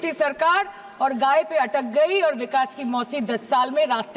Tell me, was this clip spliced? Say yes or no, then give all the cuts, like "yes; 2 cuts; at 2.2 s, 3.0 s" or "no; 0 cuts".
no; 0 cuts